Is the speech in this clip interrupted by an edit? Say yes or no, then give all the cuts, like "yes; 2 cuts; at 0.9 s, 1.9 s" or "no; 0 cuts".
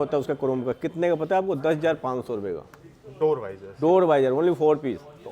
no; 0 cuts